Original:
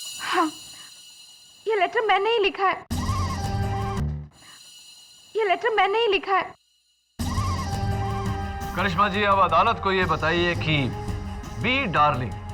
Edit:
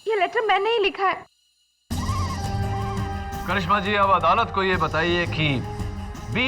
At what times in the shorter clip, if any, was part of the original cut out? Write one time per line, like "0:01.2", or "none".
0:01.2